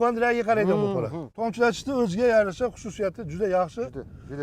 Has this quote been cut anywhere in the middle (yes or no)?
yes